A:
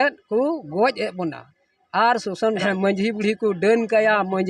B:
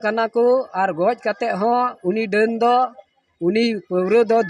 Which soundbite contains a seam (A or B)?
A